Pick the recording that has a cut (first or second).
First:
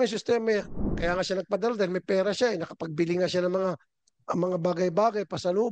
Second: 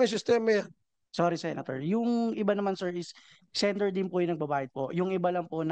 first